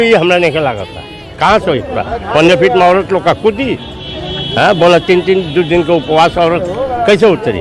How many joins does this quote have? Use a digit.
1